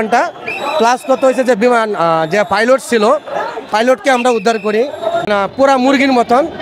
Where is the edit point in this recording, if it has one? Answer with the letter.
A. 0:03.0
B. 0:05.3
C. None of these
B